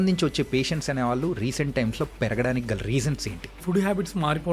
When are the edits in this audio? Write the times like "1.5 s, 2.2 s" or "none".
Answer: 3.6 s